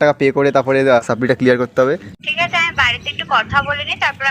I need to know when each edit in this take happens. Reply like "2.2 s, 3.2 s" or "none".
1.0 s, 2.1 s